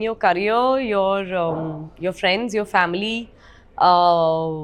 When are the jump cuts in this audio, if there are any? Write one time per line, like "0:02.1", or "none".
none